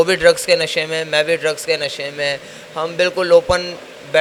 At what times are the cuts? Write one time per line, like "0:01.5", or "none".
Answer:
none